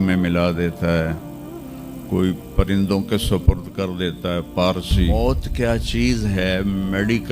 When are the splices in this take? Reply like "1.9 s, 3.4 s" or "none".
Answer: 5.1 s